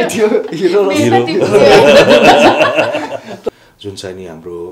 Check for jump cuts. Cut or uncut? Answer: cut